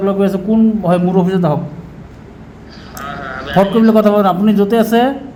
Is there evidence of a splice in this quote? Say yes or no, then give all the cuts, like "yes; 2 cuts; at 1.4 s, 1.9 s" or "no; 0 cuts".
no; 0 cuts